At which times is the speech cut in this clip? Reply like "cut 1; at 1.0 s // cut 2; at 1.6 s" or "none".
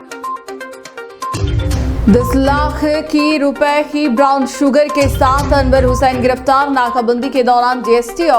none